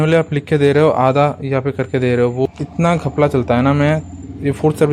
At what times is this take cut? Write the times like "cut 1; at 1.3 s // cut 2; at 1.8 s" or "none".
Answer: cut 1; at 2.4 s